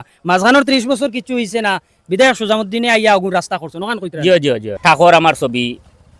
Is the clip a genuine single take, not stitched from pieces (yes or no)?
no